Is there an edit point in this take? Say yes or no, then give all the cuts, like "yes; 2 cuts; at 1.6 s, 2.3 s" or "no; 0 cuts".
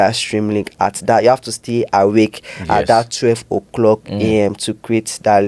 no; 0 cuts